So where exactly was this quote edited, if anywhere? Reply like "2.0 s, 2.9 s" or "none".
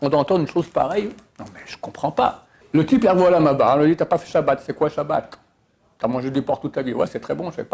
2.5 s